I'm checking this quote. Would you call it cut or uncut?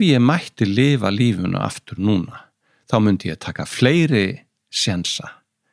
uncut